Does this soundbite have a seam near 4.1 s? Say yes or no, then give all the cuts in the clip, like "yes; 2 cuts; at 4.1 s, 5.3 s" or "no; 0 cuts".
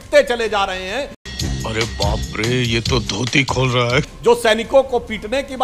yes; 2 cuts; at 1.2 s, 4.1 s